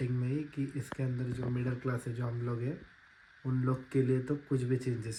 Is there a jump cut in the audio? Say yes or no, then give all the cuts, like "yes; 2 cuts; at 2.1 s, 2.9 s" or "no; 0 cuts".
no; 0 cuts